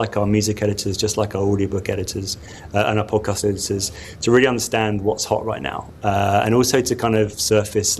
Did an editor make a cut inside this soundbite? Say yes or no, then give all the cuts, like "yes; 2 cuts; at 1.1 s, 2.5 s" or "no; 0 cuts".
no; 0 cuts